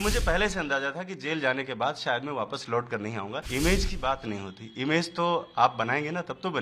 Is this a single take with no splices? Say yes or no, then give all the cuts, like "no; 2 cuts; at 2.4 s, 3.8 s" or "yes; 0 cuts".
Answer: no; 1 cut; at 3.5 s